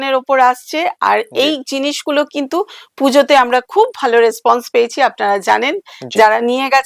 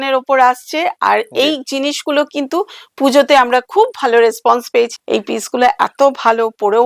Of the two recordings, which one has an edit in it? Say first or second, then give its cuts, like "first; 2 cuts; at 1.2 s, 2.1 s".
second; 1 cut; at 4.9 s